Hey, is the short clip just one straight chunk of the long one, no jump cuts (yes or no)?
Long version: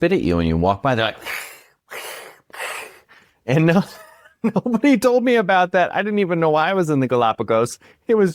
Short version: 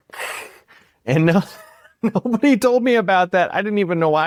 yes